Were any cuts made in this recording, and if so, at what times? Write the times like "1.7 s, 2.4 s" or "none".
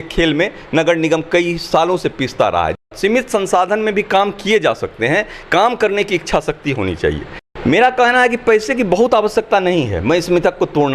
2.9 s, 7.3 s